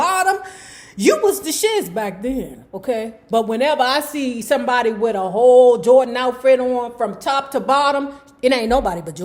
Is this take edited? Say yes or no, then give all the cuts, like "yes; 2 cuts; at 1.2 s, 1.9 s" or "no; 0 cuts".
no; 0 cuts